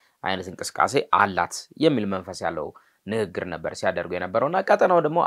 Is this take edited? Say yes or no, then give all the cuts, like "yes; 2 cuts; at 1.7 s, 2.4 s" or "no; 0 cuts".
no; 0 cuts